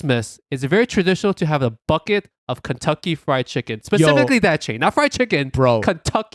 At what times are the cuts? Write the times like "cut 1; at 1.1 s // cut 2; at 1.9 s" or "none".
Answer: none

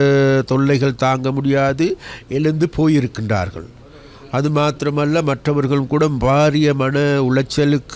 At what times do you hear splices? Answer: none

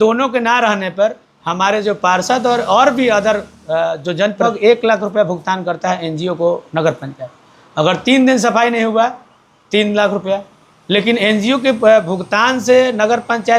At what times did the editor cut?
cut 1; at 4.4 s

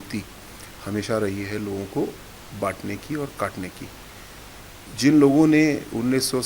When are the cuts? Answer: none

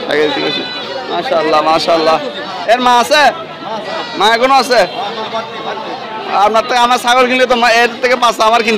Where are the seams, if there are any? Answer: none

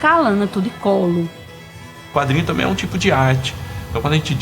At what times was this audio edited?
cut 1; at 2.0 s

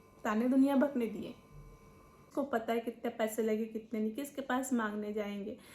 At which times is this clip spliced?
cut 1; at 2.3 s

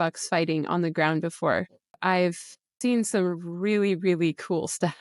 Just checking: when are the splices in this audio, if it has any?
cut 1; at 1.9 s // cut 2; at 2.8 s

